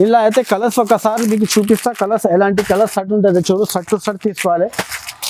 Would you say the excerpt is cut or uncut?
uncut